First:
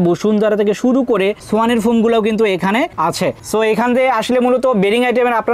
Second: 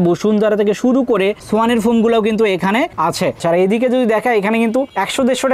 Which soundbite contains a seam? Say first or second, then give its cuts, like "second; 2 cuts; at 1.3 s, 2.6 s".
second; 1 cut; at 3.4 s